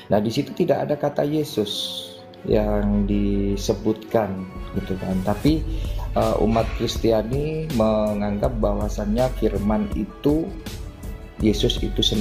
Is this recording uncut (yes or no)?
yes